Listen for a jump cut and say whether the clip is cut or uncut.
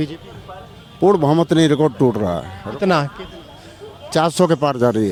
uncut